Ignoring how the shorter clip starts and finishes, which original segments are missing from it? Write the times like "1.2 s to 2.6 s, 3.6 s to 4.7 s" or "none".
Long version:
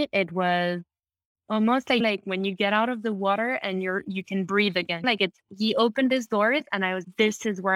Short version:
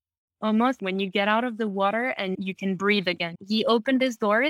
1.8 s to 2.2 s, 3.8 s to 4.0 s, 5.0 s to 5.4 s